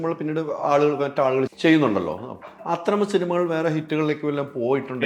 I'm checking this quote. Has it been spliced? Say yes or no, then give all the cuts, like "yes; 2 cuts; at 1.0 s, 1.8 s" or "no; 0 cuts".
yes; 1 cut; at 1.5 s